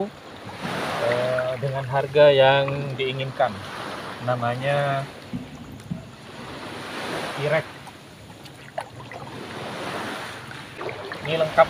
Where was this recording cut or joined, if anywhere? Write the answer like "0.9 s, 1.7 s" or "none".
10.8 s